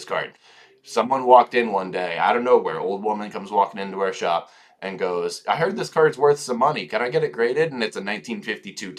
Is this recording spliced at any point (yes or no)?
no